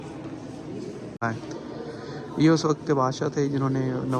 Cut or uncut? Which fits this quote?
cut